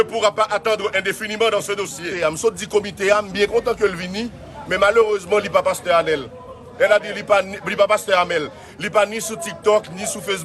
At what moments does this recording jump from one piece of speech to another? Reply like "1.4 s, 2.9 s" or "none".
2.1 s